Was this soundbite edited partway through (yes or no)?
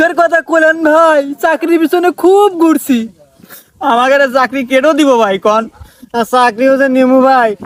no